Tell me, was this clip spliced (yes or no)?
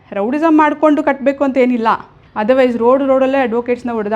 yes